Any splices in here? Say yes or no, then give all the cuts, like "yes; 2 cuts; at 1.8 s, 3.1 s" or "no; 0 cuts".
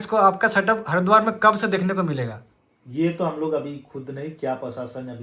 no; 0 cuts